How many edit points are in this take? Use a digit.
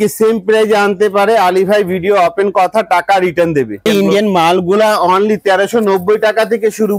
1